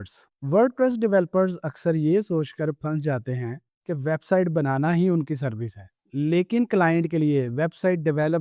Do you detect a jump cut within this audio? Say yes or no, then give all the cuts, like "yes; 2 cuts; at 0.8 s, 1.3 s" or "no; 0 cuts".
no; 0 cuts